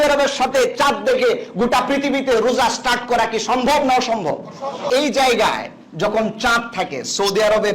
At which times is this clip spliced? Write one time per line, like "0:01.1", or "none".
0:04.9